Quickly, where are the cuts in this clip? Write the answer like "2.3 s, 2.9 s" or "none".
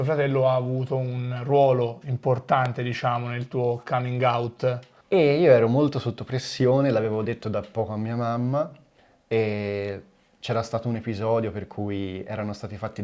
4.9 s